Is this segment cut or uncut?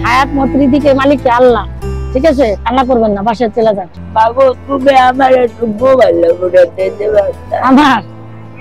uncut